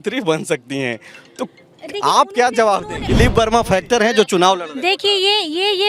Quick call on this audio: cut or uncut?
cut